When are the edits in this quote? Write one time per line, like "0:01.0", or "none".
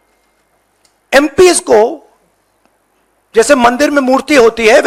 none